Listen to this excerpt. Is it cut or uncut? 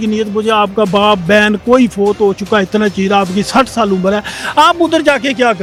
uncut